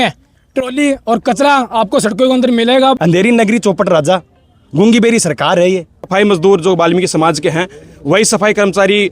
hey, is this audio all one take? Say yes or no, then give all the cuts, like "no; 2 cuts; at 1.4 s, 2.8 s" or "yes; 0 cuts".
no; 2 cuts; at 3.0 s, 6.0 s